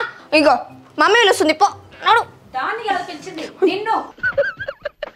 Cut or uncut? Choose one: uncut